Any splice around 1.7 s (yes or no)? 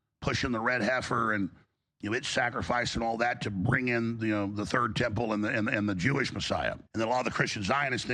no